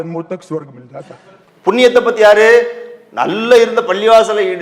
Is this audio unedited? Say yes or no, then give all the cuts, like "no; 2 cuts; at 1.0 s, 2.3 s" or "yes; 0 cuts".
yes; 0 cuts